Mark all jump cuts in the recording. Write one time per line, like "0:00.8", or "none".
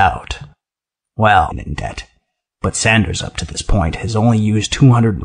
none